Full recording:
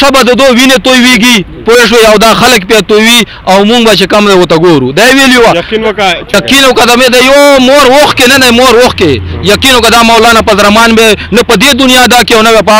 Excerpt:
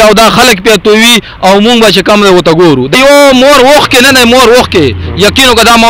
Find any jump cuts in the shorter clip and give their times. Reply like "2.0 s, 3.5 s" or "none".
2.9 s